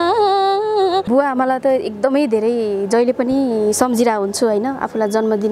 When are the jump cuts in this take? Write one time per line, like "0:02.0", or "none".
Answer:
0:01.1